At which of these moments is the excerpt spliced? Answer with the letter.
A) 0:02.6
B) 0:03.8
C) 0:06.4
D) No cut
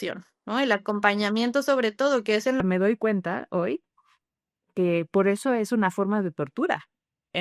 A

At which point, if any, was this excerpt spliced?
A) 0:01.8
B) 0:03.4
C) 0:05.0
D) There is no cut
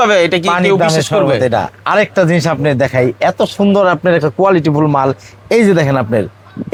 D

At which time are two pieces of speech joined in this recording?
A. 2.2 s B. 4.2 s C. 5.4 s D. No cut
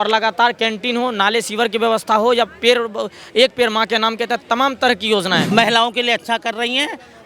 C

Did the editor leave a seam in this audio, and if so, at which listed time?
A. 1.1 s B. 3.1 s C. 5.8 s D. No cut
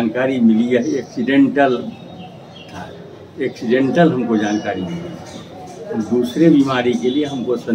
D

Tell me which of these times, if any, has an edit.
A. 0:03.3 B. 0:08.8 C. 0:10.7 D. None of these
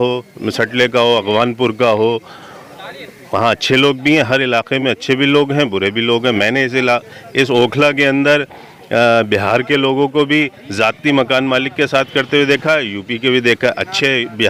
D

